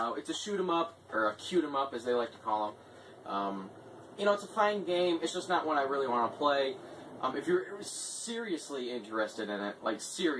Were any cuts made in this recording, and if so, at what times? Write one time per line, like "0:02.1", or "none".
0:05.8